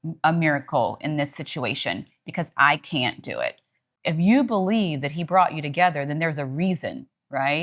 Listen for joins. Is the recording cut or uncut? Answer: cut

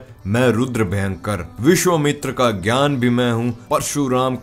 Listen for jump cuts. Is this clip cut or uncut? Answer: uncut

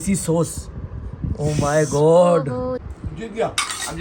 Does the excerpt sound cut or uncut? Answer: cut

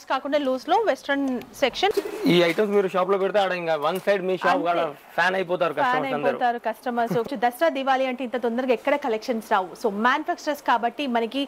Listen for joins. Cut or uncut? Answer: cut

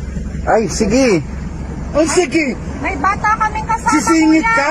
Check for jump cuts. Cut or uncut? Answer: uncut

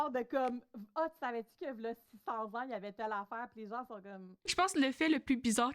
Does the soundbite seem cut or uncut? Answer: cut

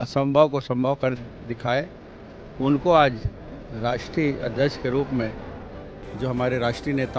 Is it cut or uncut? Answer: uncut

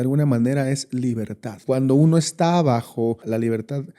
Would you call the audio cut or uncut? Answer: cut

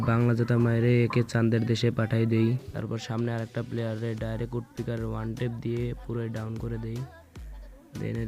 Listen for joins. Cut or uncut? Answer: cut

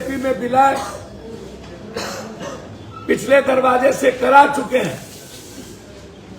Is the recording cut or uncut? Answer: uncut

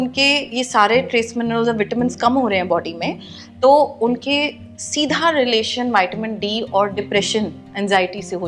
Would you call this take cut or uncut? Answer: uncut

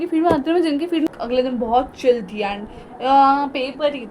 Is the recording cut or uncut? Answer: cut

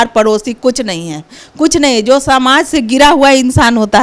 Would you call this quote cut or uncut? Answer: uncut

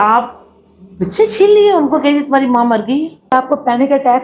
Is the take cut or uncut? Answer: cut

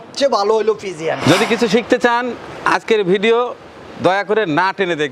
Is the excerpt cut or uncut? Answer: cut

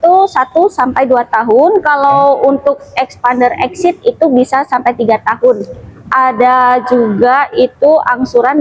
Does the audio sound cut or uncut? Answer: cut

